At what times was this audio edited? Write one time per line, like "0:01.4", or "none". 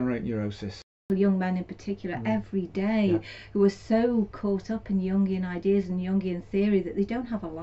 0:01.0